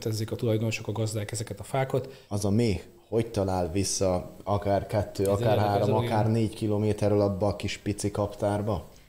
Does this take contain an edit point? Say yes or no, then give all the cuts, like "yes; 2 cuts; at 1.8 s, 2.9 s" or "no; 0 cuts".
yes; 1 cut; at 2.2 s